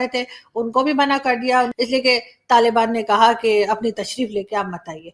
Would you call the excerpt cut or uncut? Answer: cut